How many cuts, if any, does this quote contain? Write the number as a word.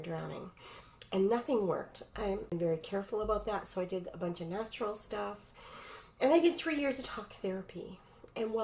one